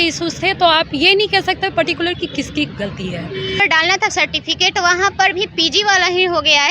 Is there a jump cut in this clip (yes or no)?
yes